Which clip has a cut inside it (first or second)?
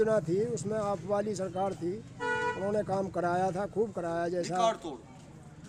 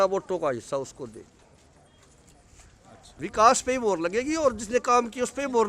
second